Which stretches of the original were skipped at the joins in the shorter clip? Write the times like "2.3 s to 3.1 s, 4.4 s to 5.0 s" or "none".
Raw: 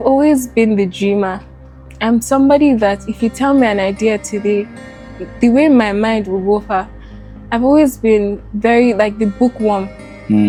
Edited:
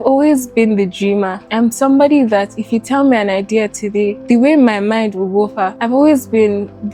1.4 s to 1.9 s, 4.7 s to 5.3 s, 6.8 s to 7.4 s